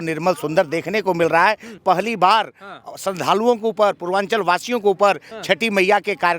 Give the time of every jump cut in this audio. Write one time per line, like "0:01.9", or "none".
0:01.7